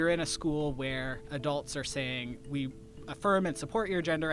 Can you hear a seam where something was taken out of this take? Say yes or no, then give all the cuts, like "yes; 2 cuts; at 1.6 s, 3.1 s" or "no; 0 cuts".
yes; 1 cut; at 1.3 s